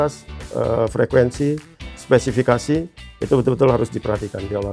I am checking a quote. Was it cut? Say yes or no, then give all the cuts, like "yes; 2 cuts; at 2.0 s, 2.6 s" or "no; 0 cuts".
no; 0 cuts